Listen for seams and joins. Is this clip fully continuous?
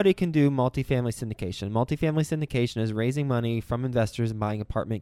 yes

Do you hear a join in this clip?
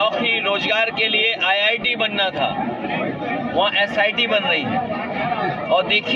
no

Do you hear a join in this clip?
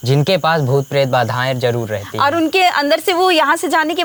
no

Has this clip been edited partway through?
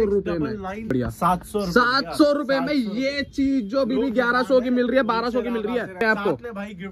yes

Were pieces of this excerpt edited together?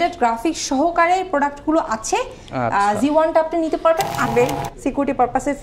yes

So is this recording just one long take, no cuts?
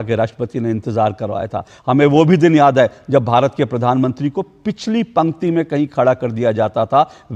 yes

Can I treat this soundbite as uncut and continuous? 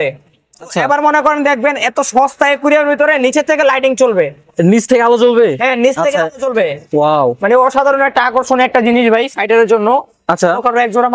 yes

